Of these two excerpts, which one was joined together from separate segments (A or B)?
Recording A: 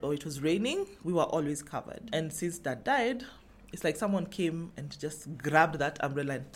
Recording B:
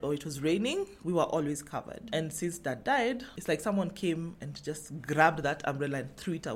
B